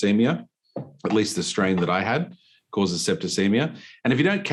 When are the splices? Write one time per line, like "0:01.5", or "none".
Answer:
none